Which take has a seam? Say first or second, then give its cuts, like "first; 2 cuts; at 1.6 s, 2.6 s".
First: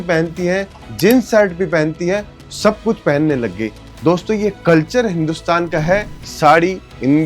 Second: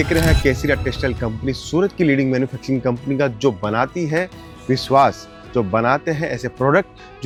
first; 1 cut; at 6.1 s